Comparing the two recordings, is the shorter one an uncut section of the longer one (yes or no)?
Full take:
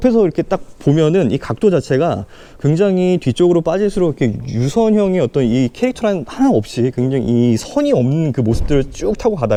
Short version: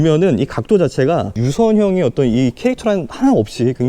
no